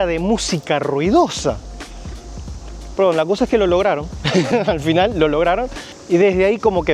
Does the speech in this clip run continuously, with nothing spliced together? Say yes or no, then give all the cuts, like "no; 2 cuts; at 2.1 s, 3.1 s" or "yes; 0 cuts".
yes; 0 cuts